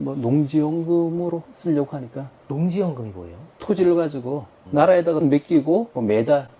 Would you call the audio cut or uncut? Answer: cut